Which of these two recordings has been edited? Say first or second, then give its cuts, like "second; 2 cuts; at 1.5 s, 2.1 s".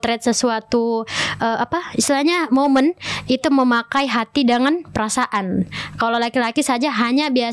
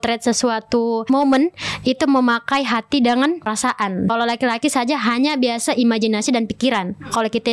second; 2 cuts; at 1.0 s, 3.6 s